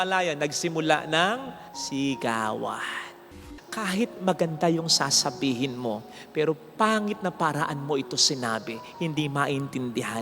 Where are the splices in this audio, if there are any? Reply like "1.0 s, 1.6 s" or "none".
3.3 s